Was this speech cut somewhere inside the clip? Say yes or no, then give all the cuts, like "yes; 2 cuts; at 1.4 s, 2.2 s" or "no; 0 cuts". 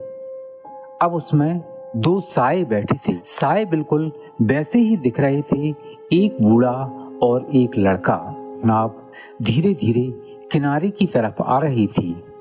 yes; 2 cuts; at 3.3 s, 8.6 s